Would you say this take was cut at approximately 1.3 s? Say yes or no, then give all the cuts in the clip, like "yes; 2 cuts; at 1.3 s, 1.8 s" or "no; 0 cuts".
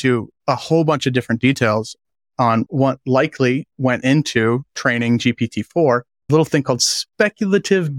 no; 2 cuts; at 2.7 s, 6.3 s